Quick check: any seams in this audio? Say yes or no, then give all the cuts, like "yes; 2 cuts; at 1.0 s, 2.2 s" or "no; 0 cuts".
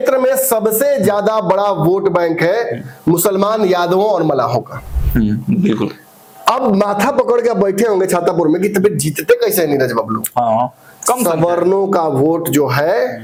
no; 0 cuts